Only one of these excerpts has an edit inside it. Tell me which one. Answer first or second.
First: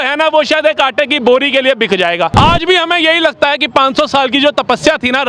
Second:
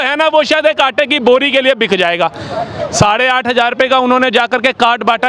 first